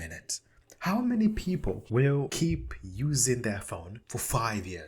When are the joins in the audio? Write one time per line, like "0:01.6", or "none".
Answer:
0:02.2
0:03.9